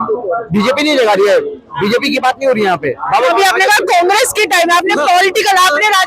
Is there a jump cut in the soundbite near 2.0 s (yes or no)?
no